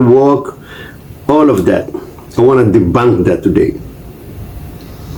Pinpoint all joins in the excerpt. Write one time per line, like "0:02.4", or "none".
none